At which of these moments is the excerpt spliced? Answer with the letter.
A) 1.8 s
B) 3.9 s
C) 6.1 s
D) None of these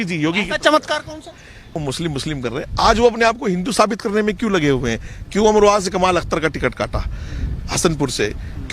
A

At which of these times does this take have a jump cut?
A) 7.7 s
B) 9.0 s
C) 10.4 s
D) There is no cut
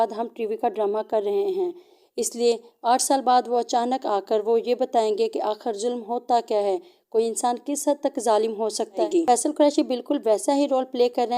B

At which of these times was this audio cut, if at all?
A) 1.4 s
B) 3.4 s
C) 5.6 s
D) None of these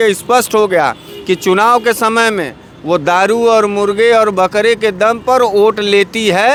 D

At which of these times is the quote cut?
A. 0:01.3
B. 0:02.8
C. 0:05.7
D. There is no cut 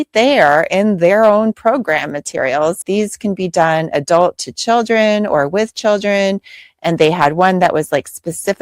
B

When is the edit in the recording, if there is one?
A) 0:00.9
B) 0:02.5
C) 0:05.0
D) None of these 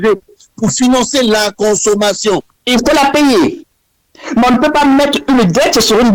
B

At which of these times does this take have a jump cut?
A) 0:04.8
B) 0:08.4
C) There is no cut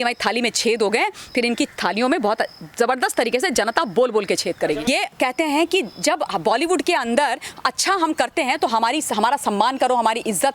A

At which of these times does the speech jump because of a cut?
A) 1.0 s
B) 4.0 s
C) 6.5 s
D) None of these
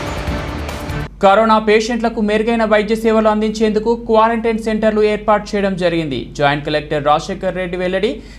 D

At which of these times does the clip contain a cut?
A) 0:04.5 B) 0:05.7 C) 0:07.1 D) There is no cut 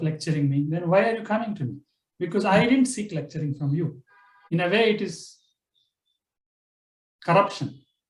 A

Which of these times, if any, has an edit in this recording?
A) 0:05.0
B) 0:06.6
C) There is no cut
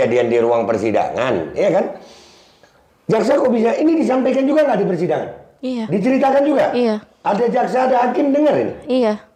C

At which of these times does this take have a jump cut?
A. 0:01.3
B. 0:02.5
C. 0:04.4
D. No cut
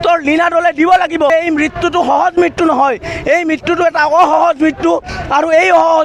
A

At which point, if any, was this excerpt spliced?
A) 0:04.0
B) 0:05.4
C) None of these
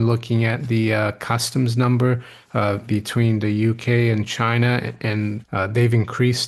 B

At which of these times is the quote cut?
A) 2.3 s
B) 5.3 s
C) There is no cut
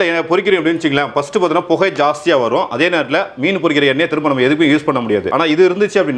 B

